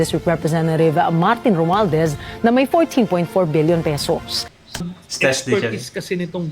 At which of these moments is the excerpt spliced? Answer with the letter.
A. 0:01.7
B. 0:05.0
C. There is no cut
B